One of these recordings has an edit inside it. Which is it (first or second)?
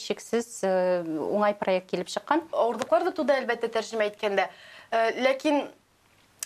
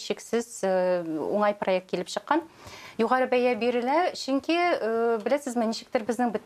first